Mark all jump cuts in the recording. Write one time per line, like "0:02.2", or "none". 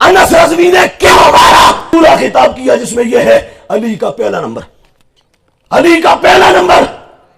0:01.9